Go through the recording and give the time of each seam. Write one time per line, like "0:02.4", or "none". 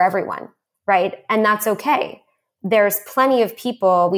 none

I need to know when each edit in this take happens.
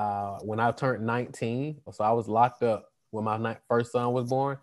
0:01.9

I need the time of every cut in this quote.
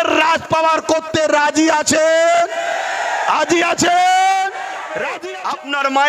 0:05.2

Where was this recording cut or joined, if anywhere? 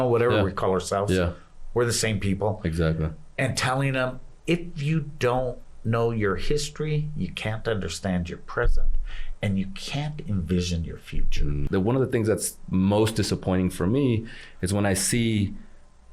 0:11.6

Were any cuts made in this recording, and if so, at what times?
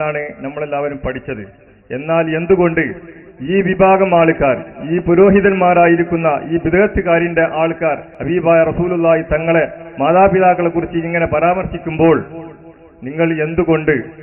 0:08.1

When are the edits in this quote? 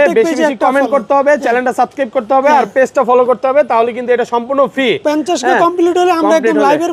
none

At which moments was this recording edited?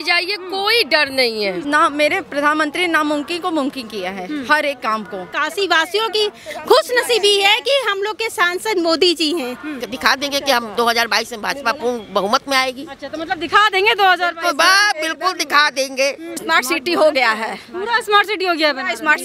0:01.6
0:05.3
0:09.8
0:16.4

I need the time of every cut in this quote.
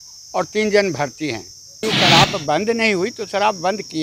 0:01.8

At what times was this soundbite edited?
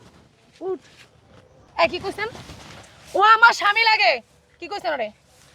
0:01.7

